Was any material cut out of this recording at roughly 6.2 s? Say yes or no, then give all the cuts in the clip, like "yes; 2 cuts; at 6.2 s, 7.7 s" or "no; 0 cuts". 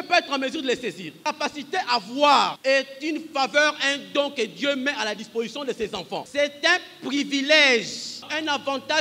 yes; 4 cuts; at 1.2 s, 2.6 s, 6.2 s, 8.2 s